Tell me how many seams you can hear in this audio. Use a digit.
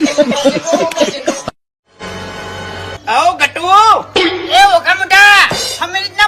1